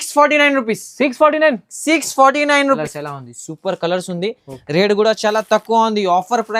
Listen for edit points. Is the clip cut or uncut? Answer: cut